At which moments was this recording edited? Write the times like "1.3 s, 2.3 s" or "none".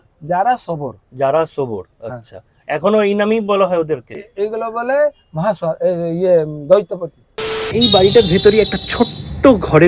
4.2 s, 7.7 s